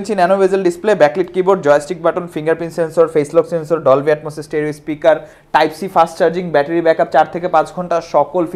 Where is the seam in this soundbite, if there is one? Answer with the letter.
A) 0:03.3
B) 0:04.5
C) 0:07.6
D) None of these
D